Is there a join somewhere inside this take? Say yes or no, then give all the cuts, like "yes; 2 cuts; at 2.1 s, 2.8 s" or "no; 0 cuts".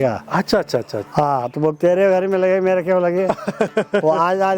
yes; 1 cut; at 1.0 s